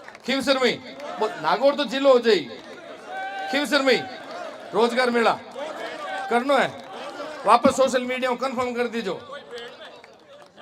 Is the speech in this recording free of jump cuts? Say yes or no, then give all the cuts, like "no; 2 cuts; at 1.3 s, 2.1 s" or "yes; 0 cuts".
yes; 0 cuts